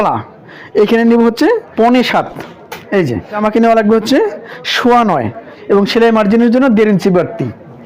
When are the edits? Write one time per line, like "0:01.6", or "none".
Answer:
0:01.7
0:03.4
0:05.5